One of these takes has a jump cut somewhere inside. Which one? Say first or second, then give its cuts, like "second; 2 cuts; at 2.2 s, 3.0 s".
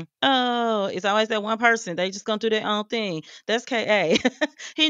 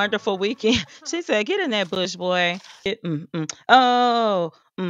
second; 1 cut; at 2.8 s